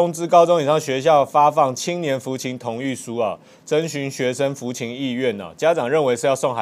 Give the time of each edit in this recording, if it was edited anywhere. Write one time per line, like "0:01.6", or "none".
none